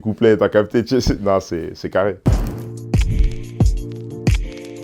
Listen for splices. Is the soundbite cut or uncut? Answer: cut